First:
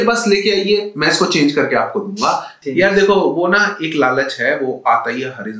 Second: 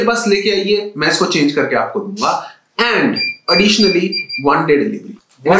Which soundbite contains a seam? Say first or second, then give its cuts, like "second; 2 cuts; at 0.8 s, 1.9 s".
first; 1 cut; at 2.6 s